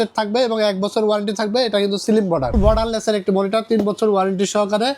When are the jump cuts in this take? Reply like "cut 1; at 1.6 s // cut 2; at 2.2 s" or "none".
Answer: cut 1; at 2.5 s